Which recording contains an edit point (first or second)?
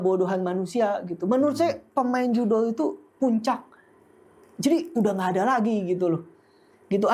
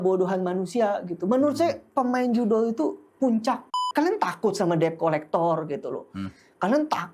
second